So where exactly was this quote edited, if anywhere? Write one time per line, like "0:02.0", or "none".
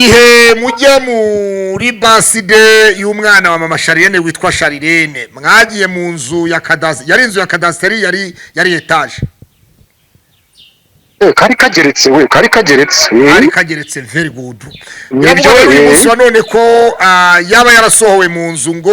none